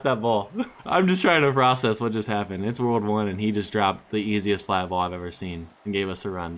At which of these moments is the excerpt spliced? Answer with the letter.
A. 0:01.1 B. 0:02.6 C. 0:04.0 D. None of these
D